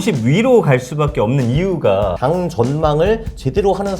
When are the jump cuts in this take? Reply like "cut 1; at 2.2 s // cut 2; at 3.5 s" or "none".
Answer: cut 1; at 2.2 s

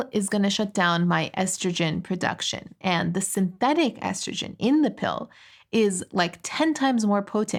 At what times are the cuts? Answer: none

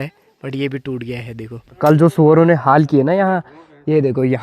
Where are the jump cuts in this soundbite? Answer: cut 1; at 1.8 s

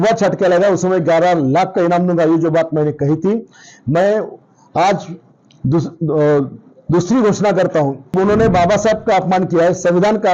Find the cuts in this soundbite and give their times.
cut 1; at 8.1 s

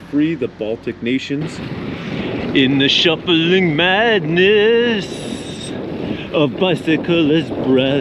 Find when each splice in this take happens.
cut 1; at 1.6 s

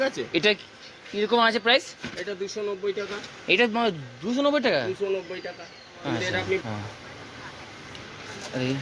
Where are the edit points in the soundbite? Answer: cut 1; at 6.6 s

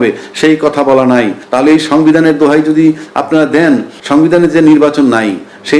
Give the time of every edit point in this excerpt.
cut 1; at 1.4 s // cut 2; at 3.9 s

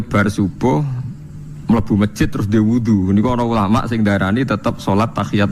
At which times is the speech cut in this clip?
none

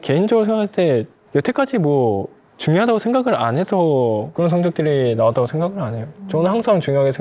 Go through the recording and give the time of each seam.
cut 1; at 6.1 s

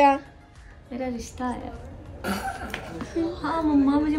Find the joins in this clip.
none

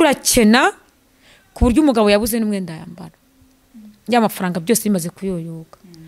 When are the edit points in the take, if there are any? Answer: none

